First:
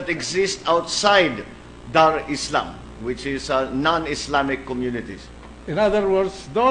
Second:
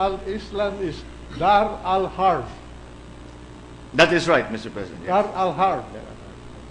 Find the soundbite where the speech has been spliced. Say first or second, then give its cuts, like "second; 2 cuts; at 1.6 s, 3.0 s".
first; 1 cut; at 3.8 s